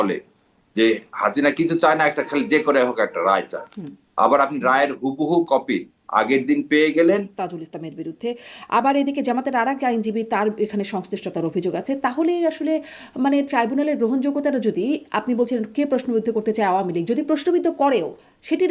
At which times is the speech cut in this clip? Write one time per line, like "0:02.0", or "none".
0:07.4